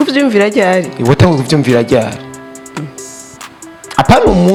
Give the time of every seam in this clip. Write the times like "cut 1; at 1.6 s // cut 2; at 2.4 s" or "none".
none